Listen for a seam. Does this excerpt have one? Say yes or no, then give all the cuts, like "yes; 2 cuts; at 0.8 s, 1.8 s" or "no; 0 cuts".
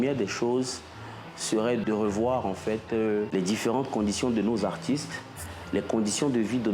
yes; 2 cuts; at 1.8 s, 3.3 s